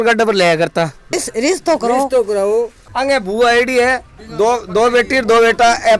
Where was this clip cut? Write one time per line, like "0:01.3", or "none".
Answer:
0:01.2
0:02.8